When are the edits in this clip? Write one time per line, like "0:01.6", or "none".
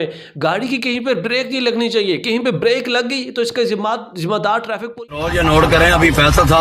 0:05.1